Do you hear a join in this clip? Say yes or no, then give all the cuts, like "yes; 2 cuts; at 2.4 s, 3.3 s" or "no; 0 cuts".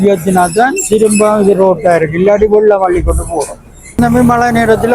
yes; 1 cut; at 4.0 s